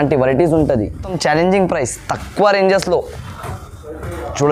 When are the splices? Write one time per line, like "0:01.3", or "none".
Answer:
none